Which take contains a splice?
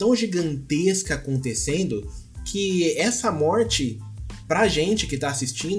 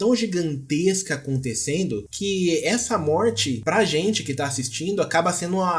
second; 2 cuts; at 2.1 s, 3.6 s

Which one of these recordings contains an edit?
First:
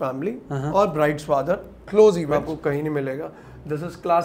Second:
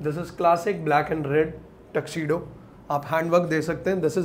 first; 1 cut; at 2.3 s

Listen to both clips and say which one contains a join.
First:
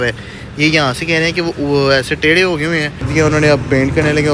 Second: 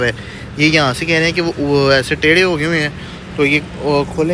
first; 1 cut; at 3.1 s

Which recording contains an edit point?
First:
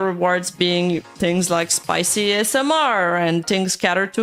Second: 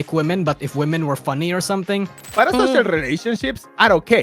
second; 1 cut; at 2.3 s

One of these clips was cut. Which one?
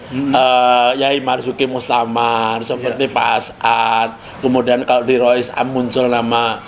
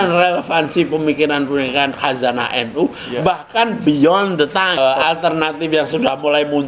second; 1 cut; at 4.8 s

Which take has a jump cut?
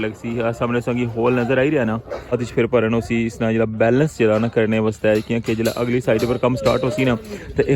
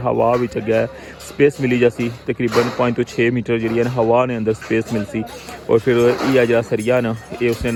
first; 1 cut; at 2.3 s

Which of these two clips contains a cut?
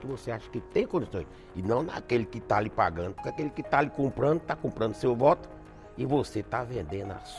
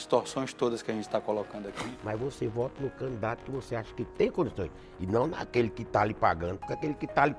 second; 1 cut; at 1.7 s

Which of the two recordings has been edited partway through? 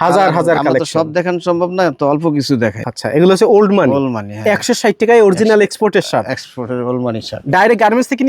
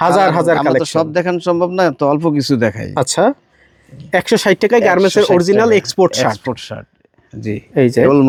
first; 1 cut; at 2.8 s

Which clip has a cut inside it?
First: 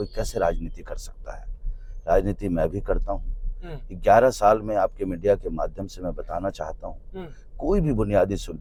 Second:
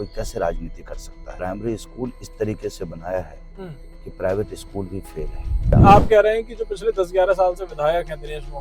second; 2 cuts; at 1.3 s, 5.7 s

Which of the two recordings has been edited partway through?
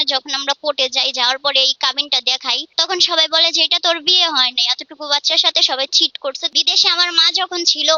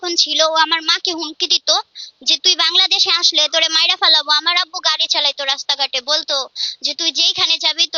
first; 2 cuts; at 2.7 s, 6.5 s

